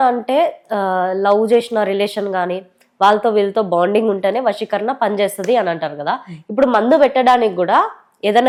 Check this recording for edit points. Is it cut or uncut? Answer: uncut